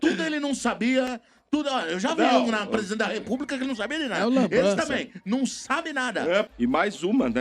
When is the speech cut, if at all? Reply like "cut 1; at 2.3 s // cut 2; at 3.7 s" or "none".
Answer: cut 1; at 6.5 s